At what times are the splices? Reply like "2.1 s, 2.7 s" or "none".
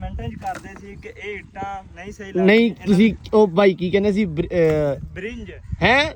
none